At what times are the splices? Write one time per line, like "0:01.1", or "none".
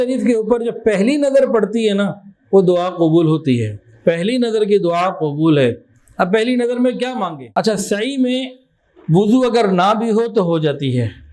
0:07.3